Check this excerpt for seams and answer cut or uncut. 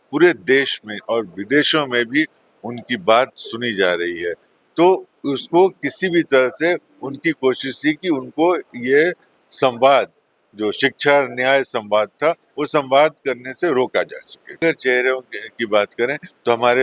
cut